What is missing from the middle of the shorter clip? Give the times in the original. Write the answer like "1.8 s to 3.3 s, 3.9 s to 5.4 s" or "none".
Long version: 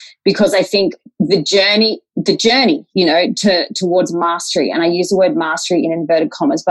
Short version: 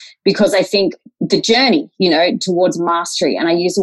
1.0 s to 2.0 s, 3.3 s to 3.7 s